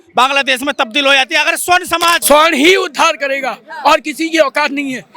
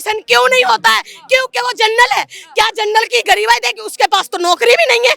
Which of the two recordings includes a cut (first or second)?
first